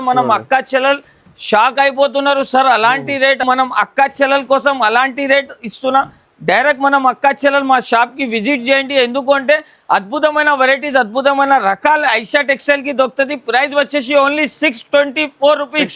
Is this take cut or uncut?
uncut